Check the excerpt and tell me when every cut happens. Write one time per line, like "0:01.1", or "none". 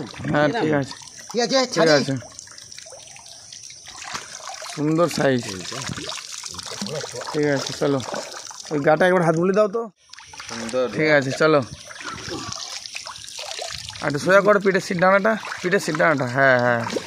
0:09.7